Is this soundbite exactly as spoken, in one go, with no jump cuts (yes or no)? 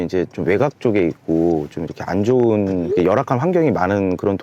yes